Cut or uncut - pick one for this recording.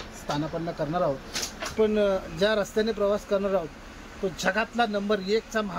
cut